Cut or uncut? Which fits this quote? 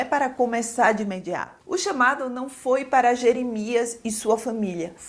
cut